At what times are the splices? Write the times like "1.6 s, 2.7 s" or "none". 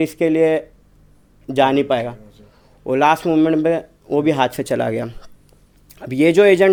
none